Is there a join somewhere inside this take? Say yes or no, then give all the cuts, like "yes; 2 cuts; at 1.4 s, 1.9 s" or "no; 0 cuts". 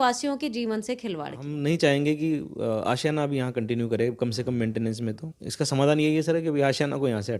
yes; 2 cuts; at 1.5 s, 5.3 s